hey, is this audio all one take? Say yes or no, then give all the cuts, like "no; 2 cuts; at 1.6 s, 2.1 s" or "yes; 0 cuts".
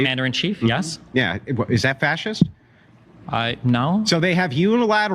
no; 1 cut; at 3.0 s